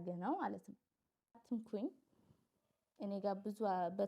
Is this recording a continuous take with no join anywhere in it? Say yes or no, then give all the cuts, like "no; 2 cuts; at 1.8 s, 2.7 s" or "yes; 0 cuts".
no; 1 cut; at 1.4 s